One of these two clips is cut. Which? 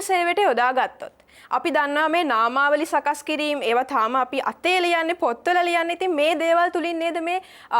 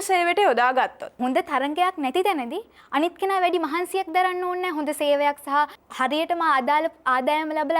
second; 2 cuts; at 1.2 s, 5.8 s

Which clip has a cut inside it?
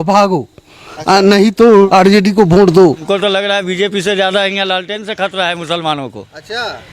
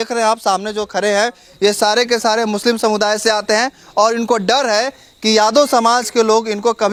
first; 2 cuts; at 1.9 s, 3.0 s

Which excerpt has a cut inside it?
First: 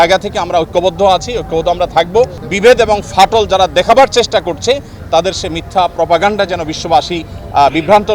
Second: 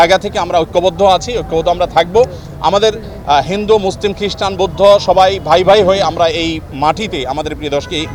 first; 1 cut; at 2.4 s

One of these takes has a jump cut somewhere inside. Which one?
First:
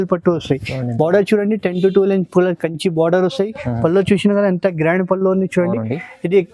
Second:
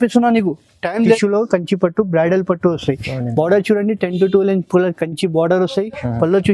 second; 1 cut; at 1.2 s

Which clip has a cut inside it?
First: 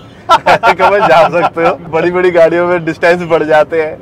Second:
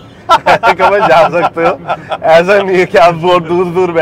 first; 1 cut; at 1.8 s

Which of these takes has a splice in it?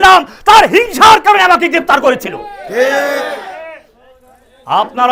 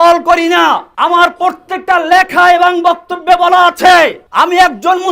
second; 2 cuts; at 0.9 s, 4.2 s

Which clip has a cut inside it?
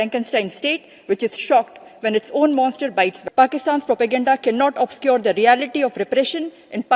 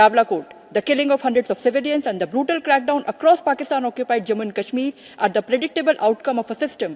first; 1 cut; at 3.2 s

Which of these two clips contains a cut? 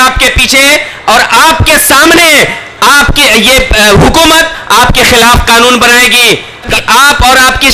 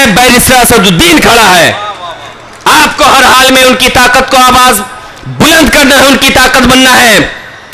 first; 1 cut; at 6.7 s

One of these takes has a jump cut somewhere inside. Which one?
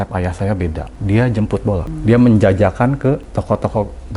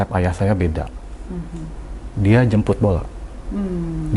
first; 3 cuts; at 0.9 s, 1.9 s, 3.3 s

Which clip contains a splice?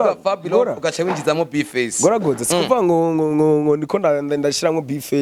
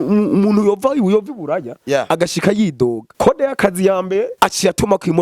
second; 2 cuts; at 3.1 s, 4.3 s

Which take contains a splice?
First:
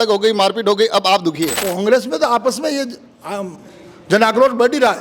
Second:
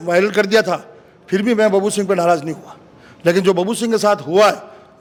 first; 1 cut; at 1.6 s

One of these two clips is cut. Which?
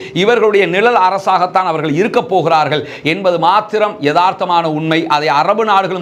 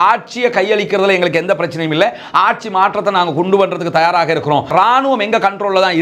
second; 1 cut; at 4.7 s

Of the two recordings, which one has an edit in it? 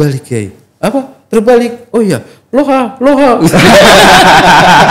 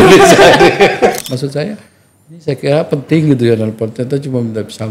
second; 1 cut; at 1.2 s

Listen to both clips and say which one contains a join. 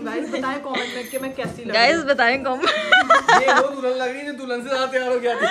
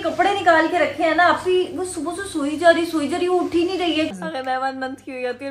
second; 1 cut; at 4.1 s

